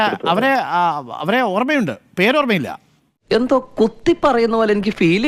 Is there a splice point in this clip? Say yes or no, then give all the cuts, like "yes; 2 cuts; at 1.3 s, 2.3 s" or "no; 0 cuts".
no; 0 cuts